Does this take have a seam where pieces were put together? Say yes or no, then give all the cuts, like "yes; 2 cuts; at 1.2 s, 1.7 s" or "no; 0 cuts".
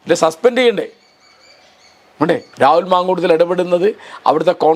yes; 1 cut; at 2.5 s